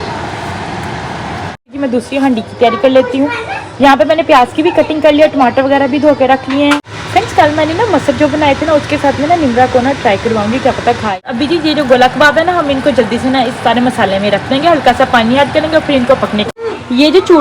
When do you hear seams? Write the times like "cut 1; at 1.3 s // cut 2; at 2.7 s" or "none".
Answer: cut 1; at 1.7 s // cut 2; at 6.9 s // cut 3; at 11.3 s // cut 4; at 16.4 s

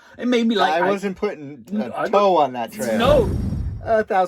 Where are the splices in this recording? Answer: cut 1; at 3.3 s

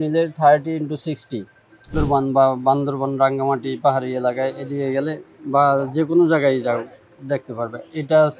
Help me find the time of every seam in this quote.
cut 1; at 1.9 s

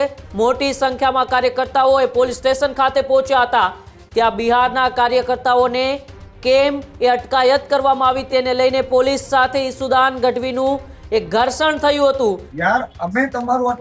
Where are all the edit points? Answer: cut 1; at 12.5 s

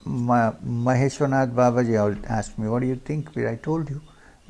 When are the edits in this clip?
none

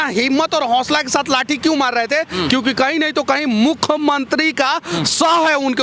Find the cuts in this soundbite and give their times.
none

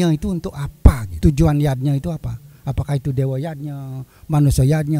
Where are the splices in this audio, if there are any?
cut 1; at 1.1 s

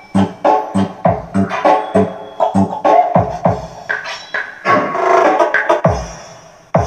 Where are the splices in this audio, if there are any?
none

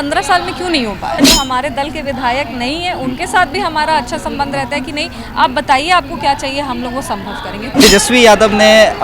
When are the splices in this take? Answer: cut 1; at 1.2 s // cut 2; at 7.8 s

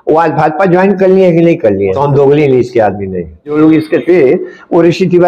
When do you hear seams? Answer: cut 1; at 1.9 s // cut 2; at 3.5 s

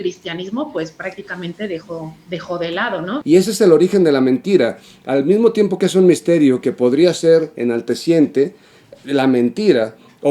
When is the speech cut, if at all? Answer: cut 1; at 3.1 s

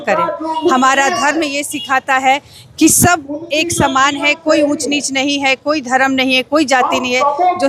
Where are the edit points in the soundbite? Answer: none

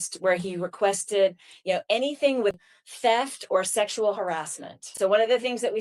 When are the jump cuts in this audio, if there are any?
cut 1; at 2.7 s // cut 2; at 4.9 s

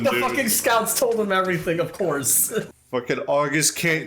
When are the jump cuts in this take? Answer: cut 1; at 2.7 s

